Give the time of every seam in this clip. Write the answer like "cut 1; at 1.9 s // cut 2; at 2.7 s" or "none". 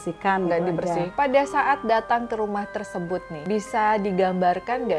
cut 1; at 1.1 s // cut 2; at 3.3 s